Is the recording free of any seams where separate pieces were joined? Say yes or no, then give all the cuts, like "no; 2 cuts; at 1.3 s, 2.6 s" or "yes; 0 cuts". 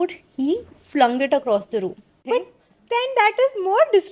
no; 1 cut; at 2.1 s